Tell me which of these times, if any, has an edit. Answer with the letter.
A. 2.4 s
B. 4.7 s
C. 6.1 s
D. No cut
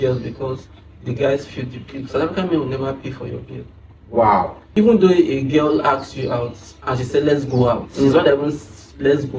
B